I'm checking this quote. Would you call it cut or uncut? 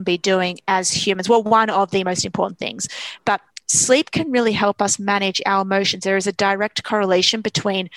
uncut